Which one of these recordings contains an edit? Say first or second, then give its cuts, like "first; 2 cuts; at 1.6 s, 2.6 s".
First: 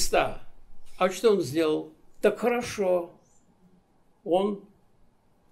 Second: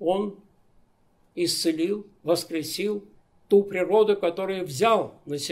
first; 1 cut; at 2.0 s